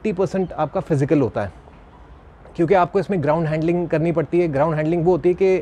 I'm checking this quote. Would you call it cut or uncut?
uncut